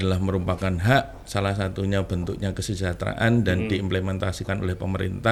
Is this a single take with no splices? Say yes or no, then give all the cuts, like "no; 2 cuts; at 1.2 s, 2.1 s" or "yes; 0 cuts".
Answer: yes; 0 cuts